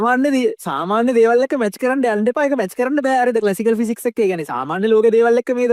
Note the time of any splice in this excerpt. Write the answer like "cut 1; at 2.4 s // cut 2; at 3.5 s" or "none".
none